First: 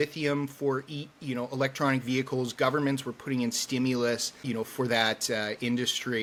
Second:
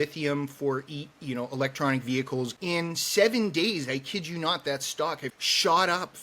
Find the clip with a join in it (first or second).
second